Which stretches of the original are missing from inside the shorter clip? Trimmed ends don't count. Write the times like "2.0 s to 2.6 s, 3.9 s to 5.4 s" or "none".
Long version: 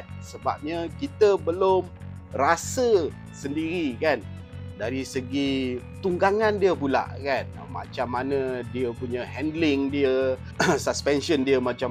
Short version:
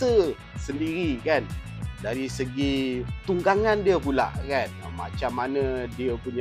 none